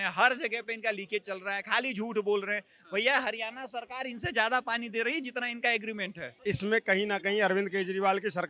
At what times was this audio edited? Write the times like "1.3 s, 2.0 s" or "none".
6.3 s